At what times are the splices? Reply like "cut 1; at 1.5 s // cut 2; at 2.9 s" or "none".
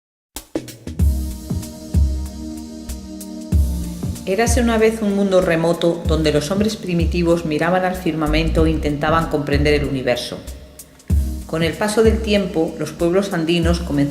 cut 1; at 11.1 s

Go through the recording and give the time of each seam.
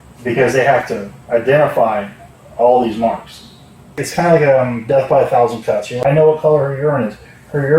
cut 1; at 4.0 s // cut 2; at 5.7 s

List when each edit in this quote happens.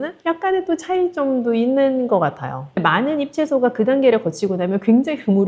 cut 1; at 2.8 s

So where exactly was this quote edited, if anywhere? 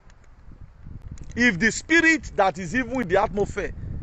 none

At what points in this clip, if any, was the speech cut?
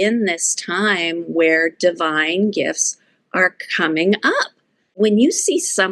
cut 1; at 4.9 s

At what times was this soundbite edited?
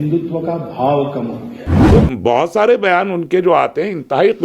cut 1; at 1.7 s

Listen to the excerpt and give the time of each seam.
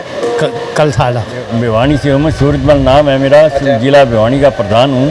cut 1; at 1.4 s

